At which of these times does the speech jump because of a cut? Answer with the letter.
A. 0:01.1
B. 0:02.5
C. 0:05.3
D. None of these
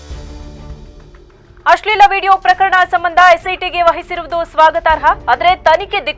A